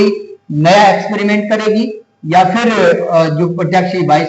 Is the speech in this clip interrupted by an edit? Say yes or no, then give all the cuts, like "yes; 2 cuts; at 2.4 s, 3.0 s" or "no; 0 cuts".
no; 0 cuts